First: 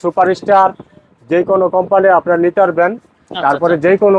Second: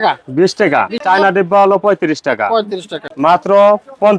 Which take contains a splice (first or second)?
second